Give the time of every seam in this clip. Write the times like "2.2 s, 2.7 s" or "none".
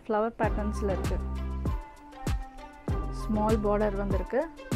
1.0 s, 2.7 s